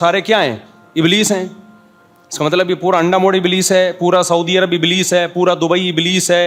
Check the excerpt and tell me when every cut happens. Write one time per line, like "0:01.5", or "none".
none